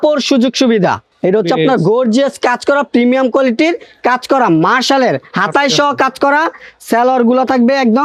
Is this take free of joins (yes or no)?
yes